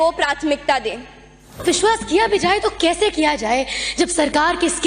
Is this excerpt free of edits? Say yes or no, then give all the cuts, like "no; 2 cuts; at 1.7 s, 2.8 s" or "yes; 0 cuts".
no; 1 cut; at 1.6 s